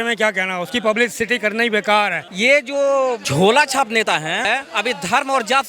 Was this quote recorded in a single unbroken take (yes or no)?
no